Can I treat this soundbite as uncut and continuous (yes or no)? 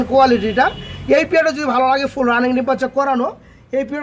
yes